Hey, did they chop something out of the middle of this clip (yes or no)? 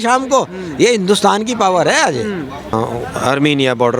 yes